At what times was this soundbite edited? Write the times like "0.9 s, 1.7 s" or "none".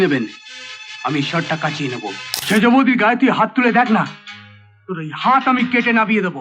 2.3 s